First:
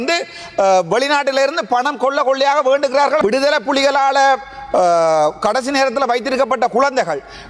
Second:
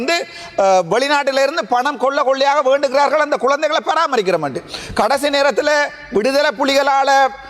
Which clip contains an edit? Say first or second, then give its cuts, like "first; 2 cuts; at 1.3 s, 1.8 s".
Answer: first; 1 cut; at 3.2 s